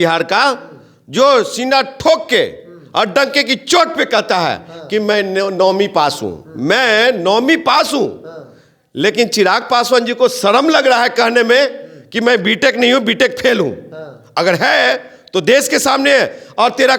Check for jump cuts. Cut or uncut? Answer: uncut